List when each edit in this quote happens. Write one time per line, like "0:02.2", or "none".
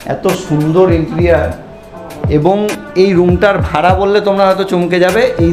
none